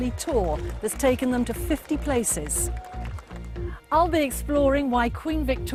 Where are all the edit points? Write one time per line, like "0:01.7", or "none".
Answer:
none